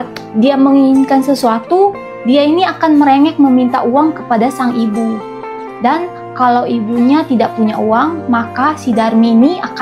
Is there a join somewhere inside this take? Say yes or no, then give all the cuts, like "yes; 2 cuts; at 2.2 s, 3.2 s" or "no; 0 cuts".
no; 0 cuts